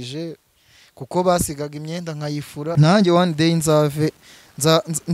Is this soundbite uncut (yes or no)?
no